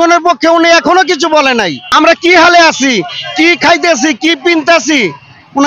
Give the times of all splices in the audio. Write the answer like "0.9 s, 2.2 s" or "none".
1.8 s